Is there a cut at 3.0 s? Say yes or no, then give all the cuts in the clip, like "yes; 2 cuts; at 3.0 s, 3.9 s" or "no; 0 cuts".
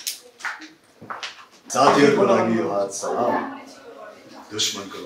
no; 1 cut; at 1.7 s